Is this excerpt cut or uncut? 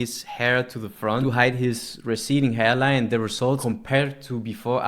cut